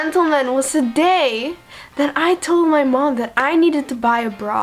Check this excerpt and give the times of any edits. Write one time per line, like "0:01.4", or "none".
none